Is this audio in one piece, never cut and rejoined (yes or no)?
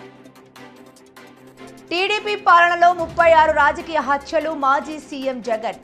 no